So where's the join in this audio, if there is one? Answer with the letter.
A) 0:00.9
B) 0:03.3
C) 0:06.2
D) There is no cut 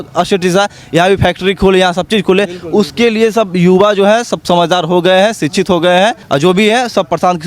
C